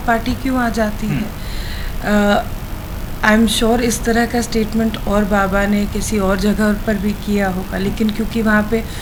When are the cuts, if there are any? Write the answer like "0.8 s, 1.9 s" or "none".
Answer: none